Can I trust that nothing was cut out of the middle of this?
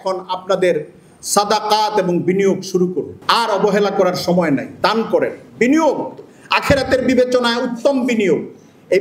no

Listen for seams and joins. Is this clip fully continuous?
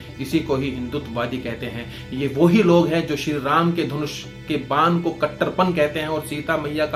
yes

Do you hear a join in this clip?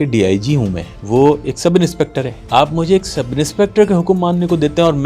yes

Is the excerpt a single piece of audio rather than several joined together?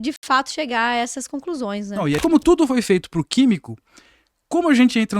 no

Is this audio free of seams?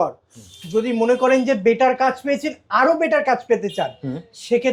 yes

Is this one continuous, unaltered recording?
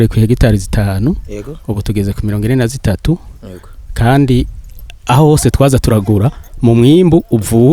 yes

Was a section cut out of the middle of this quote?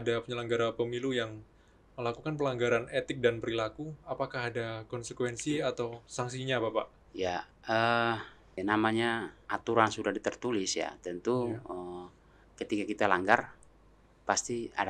yes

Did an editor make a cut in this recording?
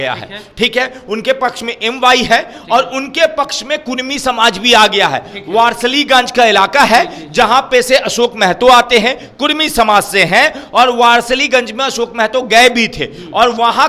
no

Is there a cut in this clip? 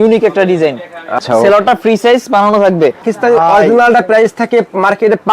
yes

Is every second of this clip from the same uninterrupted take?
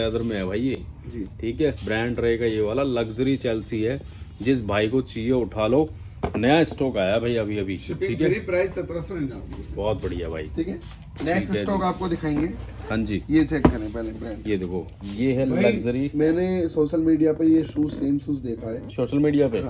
yes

